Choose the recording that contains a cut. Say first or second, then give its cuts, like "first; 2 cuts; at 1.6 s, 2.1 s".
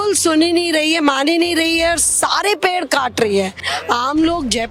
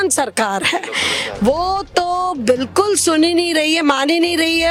first; 1 cut; at 3.7 s